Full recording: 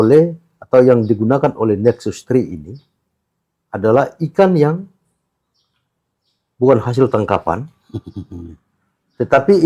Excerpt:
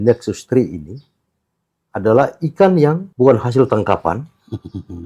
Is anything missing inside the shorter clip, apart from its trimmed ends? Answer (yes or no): yes